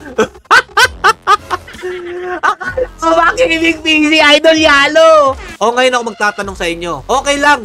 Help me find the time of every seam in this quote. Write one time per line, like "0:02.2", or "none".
0:01.7
0:05.5

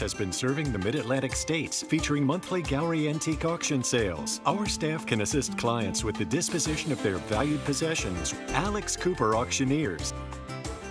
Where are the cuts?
none

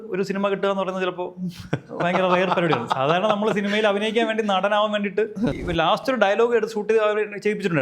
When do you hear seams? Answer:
0:05.6

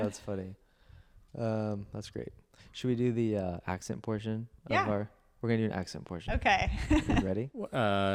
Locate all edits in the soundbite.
none

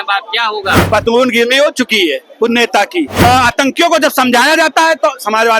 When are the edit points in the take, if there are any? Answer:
0:03.1

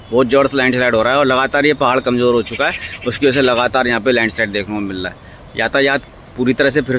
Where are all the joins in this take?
none

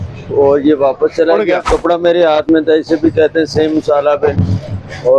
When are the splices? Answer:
0:01.7

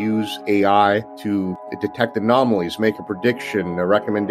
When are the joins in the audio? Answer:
0:01.5

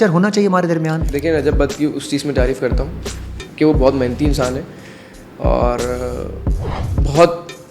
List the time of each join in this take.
0:01.0

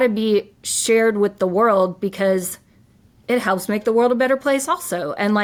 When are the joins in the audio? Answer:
none

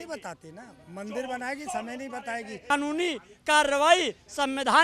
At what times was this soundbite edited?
0:02.7

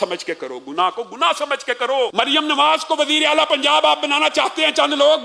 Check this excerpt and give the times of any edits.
0:02.1

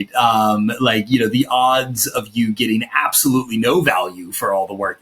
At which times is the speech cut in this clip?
none

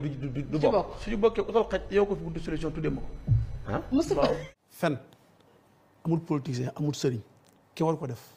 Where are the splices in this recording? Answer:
0:04.5

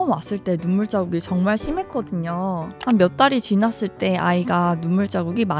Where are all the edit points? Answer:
0:02.7

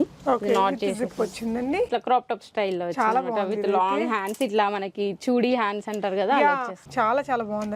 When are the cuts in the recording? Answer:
0:01.9
0:06.8

